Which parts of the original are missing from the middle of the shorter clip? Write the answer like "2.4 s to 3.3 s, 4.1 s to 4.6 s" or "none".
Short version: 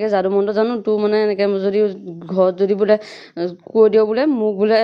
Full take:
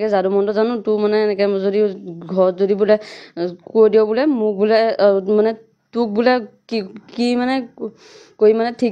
none